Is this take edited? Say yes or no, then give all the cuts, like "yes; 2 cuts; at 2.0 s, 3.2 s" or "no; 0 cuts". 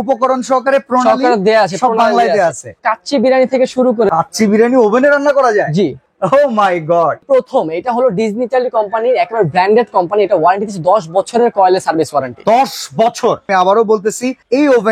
yes; 4 cuts; at 2.8 s, 4.1 s, 7.2 s, 13.5 s